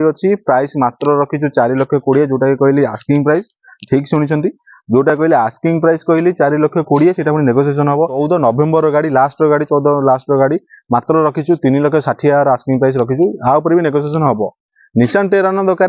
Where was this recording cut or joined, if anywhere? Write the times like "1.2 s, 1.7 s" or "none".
8.2 s